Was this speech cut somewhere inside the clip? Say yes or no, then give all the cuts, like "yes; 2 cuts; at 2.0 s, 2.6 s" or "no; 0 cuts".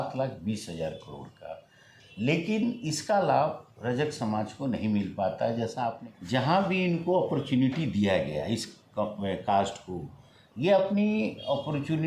yes; 1 cut; at 6.0 s